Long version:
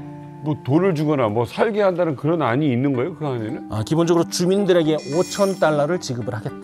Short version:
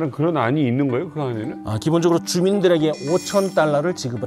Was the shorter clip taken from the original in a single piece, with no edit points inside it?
yes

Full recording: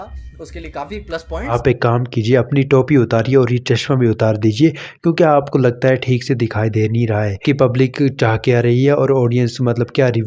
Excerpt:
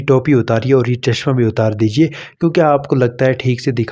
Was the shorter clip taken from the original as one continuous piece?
yes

